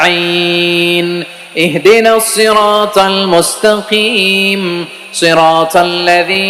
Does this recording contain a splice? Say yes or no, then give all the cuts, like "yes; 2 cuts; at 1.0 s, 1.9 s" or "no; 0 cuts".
no; 0 cuts